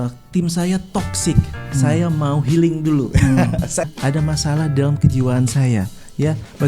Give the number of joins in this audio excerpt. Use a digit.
1